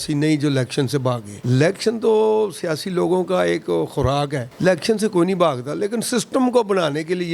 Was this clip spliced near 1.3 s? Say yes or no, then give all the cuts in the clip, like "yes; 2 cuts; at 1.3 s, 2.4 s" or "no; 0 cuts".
yes; 2 cuts; at 1.3 s, 4.4 s